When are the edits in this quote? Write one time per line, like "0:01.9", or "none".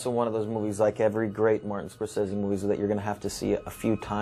none